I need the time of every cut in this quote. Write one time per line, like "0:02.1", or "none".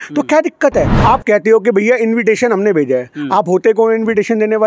0:00.9

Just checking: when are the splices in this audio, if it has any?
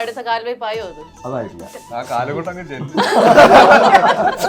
0:01.1
0:01.8

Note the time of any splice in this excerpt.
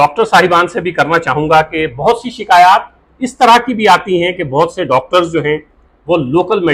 none

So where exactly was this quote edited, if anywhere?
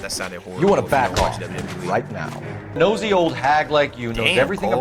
0:02.8

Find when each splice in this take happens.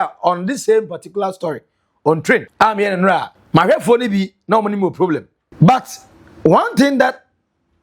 0:02.5
0:03.4
0:05.4

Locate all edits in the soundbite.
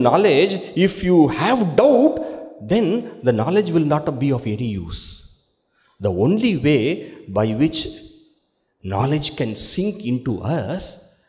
none

